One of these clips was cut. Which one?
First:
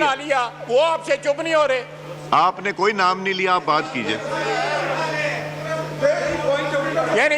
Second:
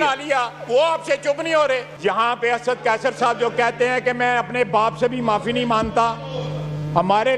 second; 1 cut; at 1.9 s

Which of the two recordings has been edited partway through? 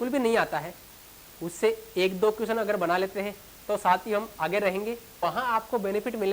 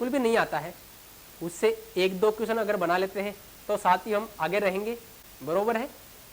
first; 1 cut; at 5.2 s

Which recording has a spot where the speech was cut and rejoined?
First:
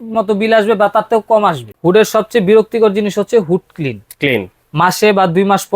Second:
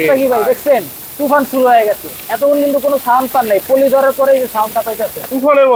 first; 1 cut; at 1.7 s

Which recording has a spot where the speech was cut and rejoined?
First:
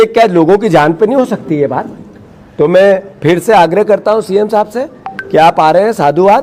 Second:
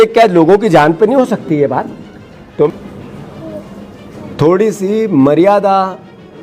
second; 1 cut; at 2.7 s

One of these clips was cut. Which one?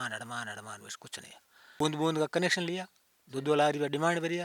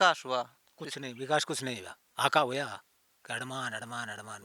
first; 1 cut; at 1.8 s

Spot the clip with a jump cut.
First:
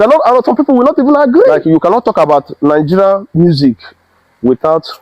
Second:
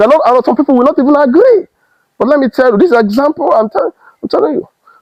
first; 1 cut; at 1.5 s

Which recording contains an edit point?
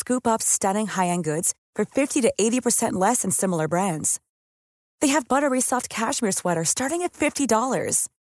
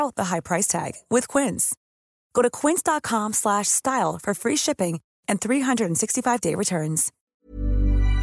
second; 1 cut; at 7.2 s

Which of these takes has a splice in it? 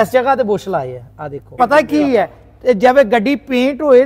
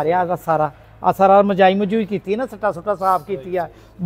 first; 1 cut; at 1.6 s

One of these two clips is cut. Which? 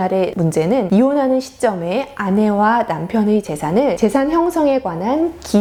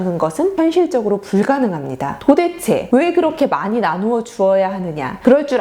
second; 1 cut; at 2.2 s

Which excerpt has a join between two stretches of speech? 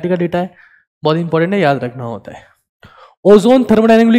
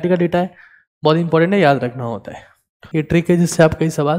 second; 1 cut; at 2.8 s

